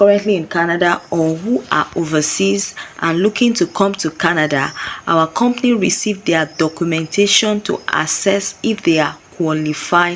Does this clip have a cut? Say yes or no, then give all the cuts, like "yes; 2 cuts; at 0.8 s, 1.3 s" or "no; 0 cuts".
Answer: no; 0 cuts